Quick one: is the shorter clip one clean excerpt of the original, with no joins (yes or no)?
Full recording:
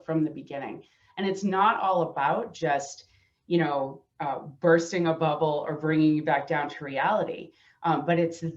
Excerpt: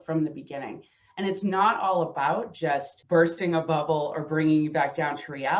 no